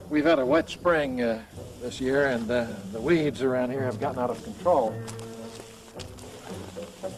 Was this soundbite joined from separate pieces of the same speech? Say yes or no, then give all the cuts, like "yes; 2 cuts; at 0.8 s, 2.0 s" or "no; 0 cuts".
yes; 1 cut; at 3.2 s